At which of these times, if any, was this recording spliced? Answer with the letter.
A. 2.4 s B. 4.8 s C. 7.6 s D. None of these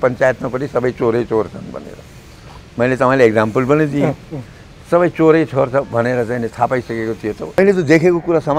C